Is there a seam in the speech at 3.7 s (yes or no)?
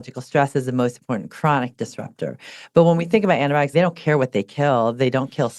yes